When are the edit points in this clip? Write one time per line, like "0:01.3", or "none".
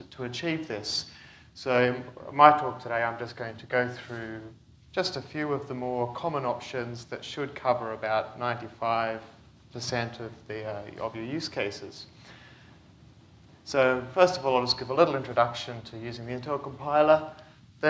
0:01.6